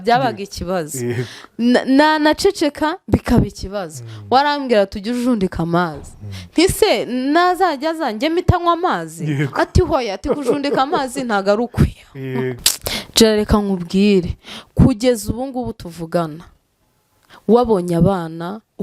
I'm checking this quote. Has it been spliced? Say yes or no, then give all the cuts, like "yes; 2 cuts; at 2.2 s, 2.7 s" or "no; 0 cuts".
yes; 1 cut; at 12.7 s